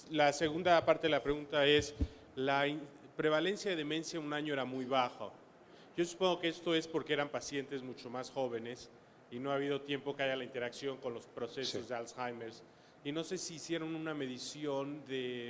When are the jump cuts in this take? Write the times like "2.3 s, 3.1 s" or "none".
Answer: 1.9 s